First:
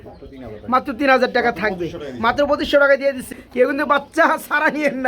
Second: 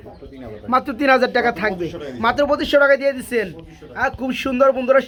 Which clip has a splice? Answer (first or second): first